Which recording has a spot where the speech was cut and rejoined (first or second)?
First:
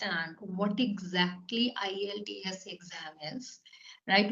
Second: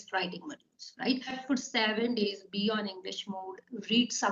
second